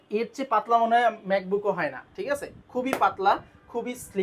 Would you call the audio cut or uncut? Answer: uncut